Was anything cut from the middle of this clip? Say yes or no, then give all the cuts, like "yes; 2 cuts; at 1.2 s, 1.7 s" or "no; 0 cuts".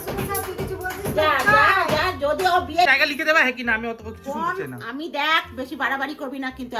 yes; 1 cut; at 2.9 s